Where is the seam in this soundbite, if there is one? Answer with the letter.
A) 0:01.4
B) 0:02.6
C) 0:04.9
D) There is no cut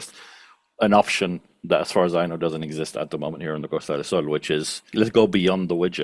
C